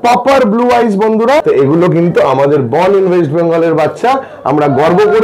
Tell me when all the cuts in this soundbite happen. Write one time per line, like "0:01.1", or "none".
0:01.4